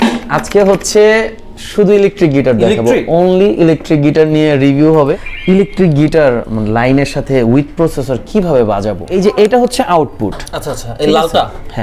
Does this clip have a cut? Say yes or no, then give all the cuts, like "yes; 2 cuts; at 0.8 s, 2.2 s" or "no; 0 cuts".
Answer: yes; 2 cuts; at 5.0 s, 9.1 s